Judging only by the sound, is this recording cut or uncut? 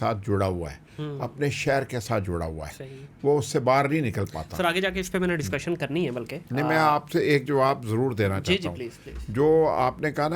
uncut